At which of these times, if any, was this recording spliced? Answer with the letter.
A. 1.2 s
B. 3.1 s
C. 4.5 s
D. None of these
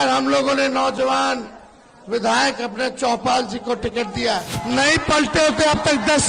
C